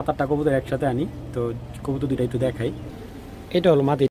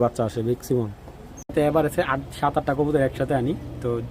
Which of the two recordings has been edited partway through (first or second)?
second